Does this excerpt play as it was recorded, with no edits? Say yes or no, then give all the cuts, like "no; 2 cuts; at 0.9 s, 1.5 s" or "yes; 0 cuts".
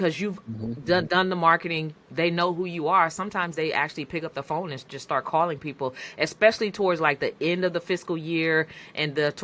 yes; 0 cuts